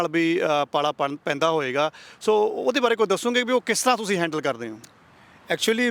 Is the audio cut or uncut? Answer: uncut